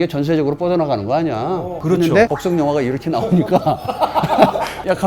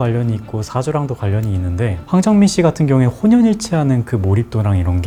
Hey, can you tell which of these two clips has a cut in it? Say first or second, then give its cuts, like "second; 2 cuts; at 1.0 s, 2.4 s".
first; 1 cut; at 1.8 s